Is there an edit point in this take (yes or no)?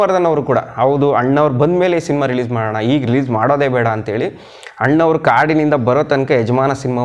no